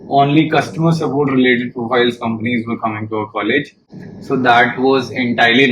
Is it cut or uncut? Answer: uncut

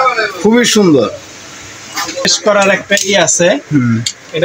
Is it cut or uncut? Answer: cut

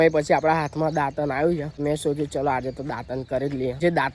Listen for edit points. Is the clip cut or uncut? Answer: cut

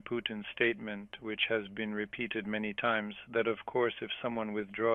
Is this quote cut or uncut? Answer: uncut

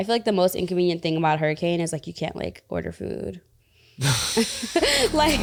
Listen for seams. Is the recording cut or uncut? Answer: uncut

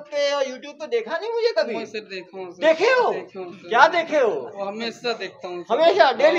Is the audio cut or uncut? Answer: uncut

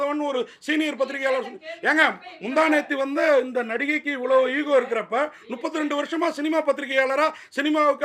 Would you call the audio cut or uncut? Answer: uncut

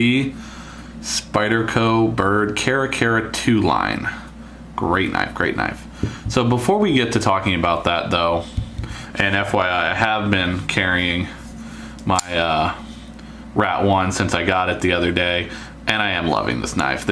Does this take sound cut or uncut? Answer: uncut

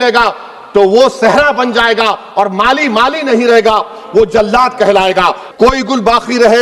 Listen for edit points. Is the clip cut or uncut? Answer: cut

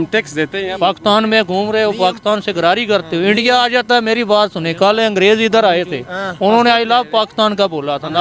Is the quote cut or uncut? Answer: uncut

